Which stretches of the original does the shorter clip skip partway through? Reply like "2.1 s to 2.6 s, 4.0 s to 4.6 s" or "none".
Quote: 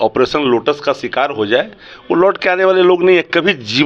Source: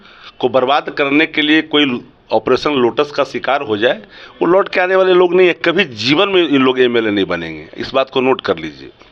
none